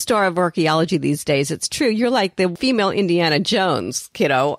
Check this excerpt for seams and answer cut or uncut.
cut